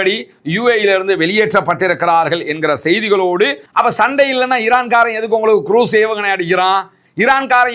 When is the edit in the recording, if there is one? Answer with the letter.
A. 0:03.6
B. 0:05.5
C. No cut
A